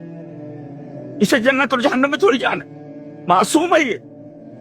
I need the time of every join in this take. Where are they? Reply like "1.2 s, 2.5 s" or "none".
none